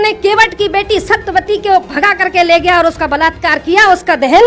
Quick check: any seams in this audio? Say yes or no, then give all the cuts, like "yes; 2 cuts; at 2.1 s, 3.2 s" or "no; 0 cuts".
no; 0 cuts